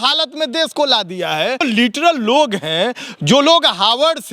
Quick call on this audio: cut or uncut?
cut